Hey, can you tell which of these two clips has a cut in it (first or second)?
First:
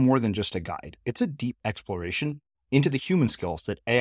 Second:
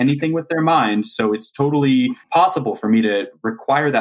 second